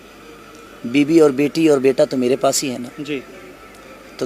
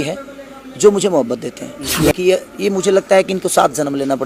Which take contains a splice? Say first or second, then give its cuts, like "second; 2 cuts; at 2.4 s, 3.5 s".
second; 1 cut; at 2.0 s